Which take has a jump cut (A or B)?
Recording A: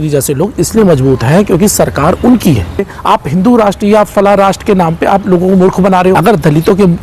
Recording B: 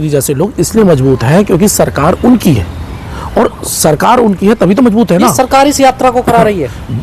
A